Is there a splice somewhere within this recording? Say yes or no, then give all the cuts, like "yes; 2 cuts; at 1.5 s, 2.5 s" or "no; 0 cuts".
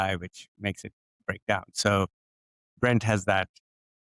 no; 0 cuts